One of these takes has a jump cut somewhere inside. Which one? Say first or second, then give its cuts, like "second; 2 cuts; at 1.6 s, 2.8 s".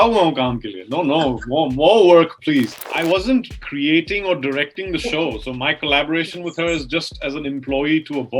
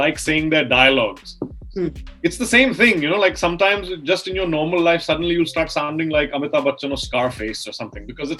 first; 2 cuts; at 2.8 s, 3.6 s